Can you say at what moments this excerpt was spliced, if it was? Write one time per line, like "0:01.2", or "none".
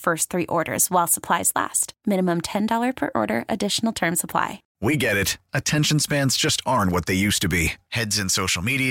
0:04.6